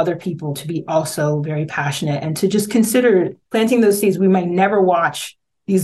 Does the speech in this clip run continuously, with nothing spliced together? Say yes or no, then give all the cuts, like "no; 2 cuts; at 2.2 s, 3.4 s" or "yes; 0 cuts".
no; 1 cut; at 3.4 s